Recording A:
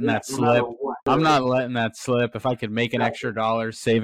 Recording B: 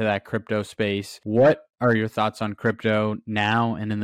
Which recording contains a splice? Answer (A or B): A